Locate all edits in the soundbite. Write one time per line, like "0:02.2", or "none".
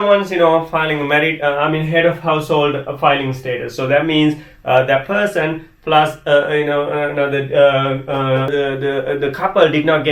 0:08.5